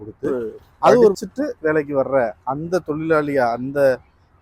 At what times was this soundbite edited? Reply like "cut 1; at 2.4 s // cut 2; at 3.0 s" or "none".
cut 1; at 1.2 s